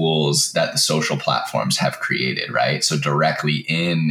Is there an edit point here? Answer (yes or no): no